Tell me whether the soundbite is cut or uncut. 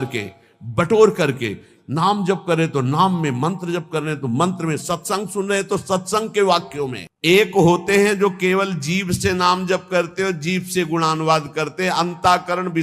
cut